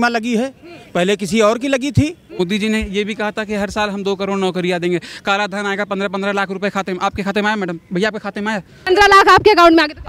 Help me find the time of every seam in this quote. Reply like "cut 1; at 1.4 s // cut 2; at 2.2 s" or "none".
cut 1; at 2.4 s // cut 2; at 8.8 s